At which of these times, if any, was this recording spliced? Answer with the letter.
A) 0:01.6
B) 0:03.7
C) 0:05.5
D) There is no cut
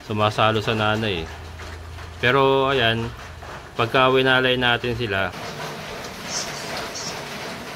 C